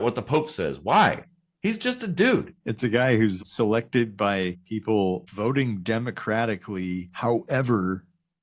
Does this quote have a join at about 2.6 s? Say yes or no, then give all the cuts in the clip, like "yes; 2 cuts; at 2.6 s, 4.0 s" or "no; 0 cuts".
yes; 5 cuts; at 2.6 s, 3.4 s, 4.6 s, 5.3 s, 7.1 s